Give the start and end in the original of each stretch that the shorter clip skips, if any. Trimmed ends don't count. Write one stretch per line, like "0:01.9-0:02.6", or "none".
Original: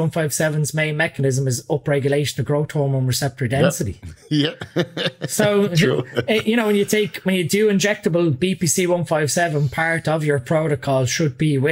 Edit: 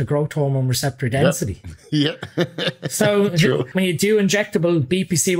0:06.1-0:07.2

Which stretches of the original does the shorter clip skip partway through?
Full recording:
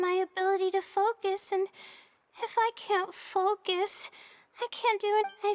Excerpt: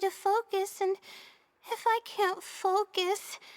none

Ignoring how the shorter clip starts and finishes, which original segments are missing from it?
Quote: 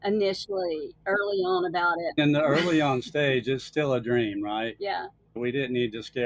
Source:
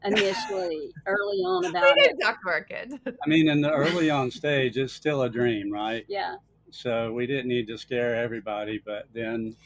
0:01.8-0:03.1
0:06.6-0:07.1

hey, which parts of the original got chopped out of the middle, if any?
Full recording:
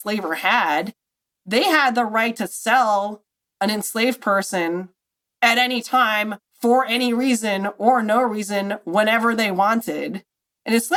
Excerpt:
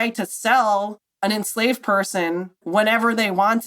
0:03.2-0:03.4
0:05.0-0:08.8

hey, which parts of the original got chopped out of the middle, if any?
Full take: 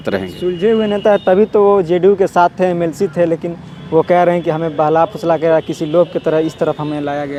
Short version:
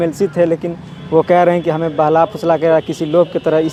none

